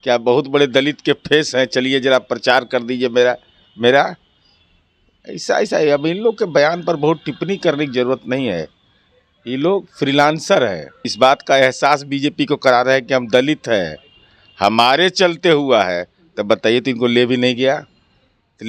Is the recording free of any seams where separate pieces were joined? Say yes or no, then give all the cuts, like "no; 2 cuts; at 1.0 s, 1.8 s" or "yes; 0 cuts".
no; 1 cut; at 11.1 s